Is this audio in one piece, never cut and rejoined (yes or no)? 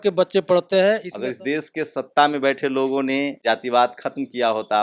no